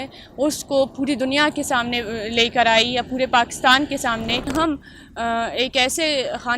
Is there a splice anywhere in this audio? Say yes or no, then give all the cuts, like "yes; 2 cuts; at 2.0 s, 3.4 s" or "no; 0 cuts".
yes; 1 cut; at 4.5 s